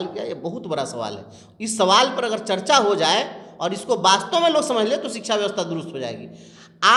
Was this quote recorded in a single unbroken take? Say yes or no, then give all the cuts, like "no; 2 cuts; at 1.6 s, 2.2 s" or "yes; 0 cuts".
yes; 0 cuts